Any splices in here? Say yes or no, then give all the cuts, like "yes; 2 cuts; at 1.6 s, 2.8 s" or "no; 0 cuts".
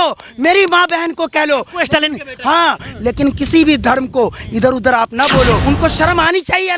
yes; 2 cuts; at 2.9 s, 5.6 s